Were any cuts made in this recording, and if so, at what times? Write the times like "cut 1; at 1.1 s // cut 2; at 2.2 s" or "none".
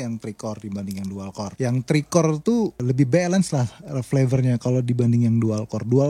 cut 1; at 1.5 s // cut 2; at 2.8 s